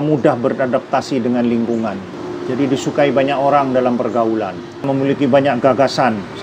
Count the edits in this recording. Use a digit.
2